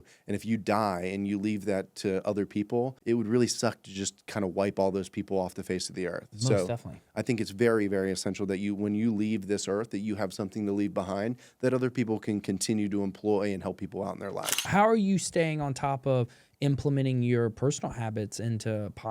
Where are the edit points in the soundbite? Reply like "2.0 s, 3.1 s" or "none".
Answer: 3.0 s, 14.7 s